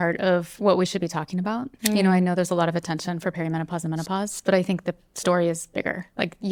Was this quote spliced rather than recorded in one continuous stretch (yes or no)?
no